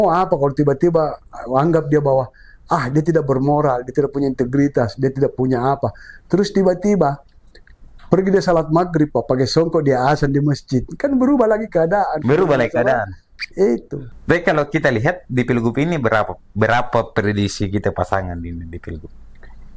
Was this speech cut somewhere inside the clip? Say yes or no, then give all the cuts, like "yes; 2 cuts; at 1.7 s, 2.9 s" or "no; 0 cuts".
yes; 1 cut; at 14.1 s